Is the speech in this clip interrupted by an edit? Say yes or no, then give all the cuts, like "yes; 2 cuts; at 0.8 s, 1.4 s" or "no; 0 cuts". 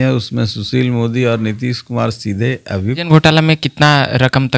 yes; 1 cut; at 3.1 s